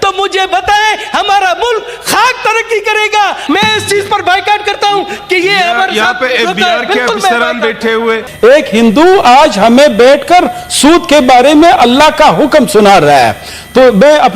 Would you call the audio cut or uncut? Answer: cut